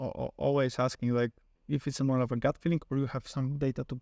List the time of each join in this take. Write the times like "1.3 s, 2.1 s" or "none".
none